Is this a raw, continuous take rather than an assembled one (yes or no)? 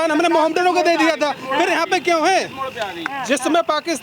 yes